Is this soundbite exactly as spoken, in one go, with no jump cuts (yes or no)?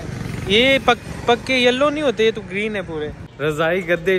no